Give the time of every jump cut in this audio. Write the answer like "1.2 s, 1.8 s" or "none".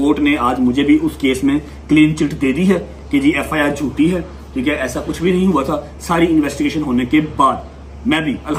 none